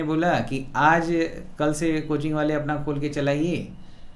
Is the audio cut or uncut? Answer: uncut